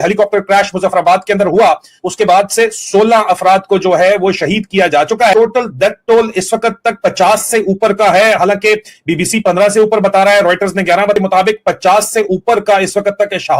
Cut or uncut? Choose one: uncut